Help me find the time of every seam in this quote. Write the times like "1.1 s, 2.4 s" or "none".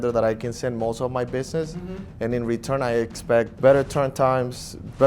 3.5 s